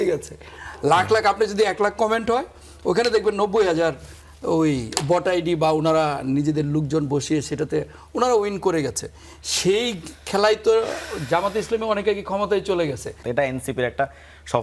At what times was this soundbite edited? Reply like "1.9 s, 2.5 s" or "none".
13.1 s